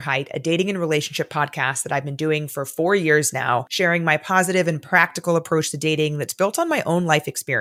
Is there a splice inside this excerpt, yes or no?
no